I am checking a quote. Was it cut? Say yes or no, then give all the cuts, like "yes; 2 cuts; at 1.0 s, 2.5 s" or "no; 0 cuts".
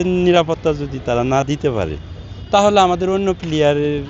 no; 0 cuts